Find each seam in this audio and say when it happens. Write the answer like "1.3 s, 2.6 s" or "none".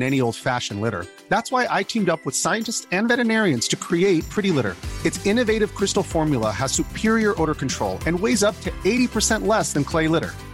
none